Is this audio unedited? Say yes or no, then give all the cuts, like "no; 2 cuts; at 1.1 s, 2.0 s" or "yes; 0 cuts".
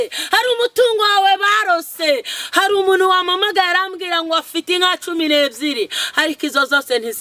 yes; 0 cuts